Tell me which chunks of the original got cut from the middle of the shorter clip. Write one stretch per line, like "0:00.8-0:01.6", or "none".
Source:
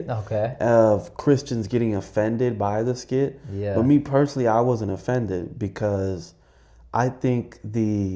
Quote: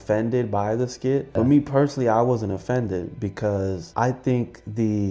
0:03.4-0:03.7
0:06.2-0:06.8